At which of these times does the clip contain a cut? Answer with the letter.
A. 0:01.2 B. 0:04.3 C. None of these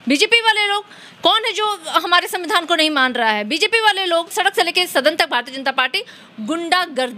B